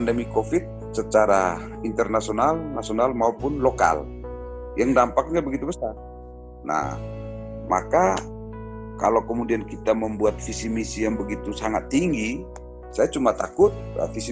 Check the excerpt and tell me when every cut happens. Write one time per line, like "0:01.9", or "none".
none